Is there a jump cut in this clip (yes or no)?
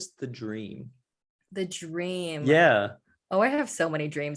no